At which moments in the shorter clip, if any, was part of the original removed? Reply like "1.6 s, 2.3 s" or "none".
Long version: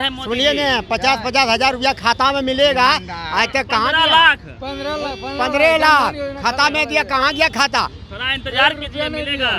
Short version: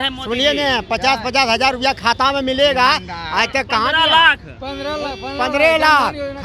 none